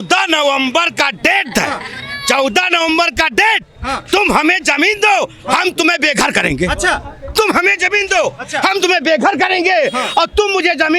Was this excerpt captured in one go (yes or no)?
yes